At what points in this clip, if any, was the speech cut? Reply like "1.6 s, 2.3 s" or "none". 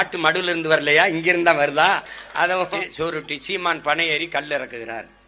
2.7 s